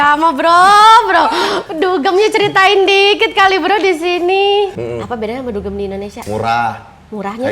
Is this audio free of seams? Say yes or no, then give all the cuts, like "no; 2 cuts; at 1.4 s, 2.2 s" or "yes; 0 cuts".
no; 2 cuts; at 1.6 s, 4.7 s